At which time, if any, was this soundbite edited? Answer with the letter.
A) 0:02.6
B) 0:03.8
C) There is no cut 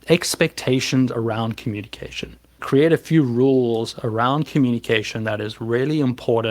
A